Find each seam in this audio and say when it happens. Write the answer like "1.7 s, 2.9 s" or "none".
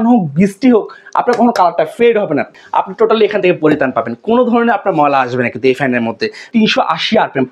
2.5 s, 6.5 s